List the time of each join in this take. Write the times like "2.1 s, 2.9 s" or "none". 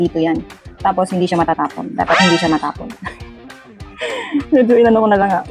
none